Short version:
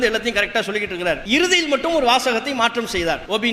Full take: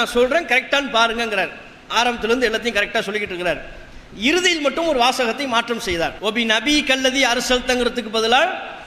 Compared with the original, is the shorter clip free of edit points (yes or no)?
no